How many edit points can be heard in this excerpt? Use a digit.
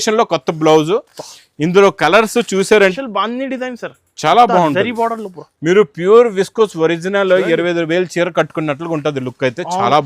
1